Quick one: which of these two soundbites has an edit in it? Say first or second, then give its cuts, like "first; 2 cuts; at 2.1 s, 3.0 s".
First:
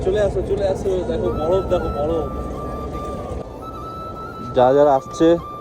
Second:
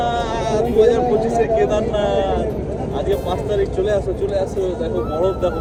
first; 1 cut; at 3.4 s